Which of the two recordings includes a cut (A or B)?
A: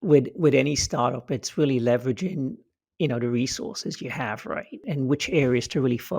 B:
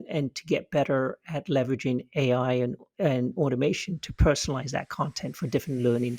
A